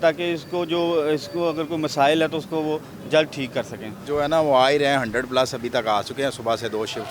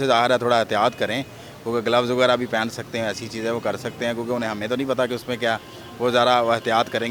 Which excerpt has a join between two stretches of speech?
first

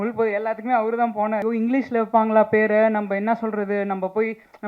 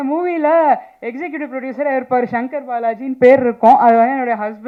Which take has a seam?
first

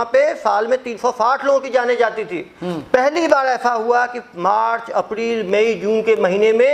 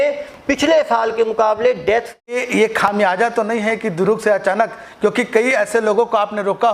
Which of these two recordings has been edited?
second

